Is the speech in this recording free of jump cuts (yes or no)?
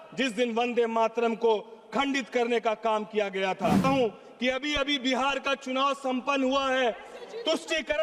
no